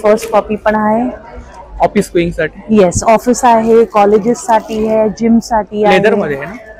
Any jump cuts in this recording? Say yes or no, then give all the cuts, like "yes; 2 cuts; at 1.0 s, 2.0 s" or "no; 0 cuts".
no; 0 cuts